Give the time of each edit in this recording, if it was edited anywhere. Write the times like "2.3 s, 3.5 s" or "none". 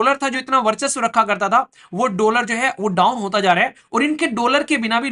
none